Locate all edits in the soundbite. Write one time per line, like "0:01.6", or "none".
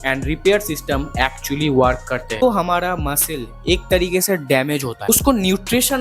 0:02.4
0:05.1